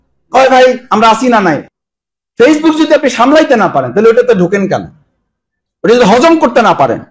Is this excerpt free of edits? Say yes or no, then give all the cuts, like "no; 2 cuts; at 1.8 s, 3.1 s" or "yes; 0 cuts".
no; 1 cut; at 1.7 s